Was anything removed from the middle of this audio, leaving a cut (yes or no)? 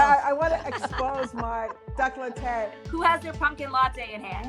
yes